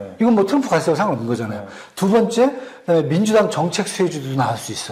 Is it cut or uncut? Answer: uncut